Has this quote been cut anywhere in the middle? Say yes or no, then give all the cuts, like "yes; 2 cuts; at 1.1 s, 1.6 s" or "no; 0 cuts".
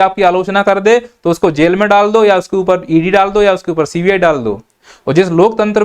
yes; 1 cut; at 4.7 s